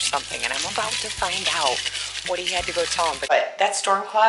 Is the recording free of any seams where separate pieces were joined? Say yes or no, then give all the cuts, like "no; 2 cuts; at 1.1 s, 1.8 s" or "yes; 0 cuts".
no; 1 cut; at 3.3 s